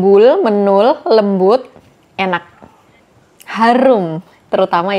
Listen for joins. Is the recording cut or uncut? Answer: uncut